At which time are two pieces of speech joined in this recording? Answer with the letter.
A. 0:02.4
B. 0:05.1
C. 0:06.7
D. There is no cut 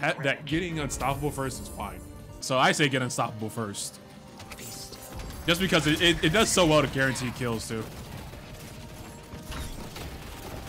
A